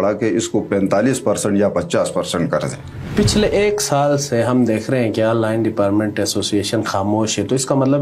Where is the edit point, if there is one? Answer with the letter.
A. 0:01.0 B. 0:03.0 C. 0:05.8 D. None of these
B